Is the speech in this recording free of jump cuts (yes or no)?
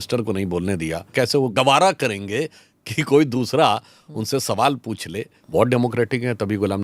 no